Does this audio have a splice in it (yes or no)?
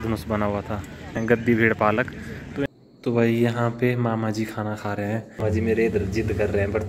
yes